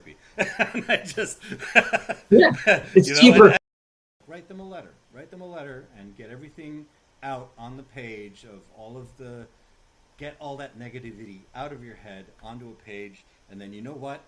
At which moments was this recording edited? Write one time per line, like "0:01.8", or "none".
0:03.6